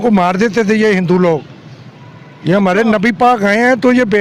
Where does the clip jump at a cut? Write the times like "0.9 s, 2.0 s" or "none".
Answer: none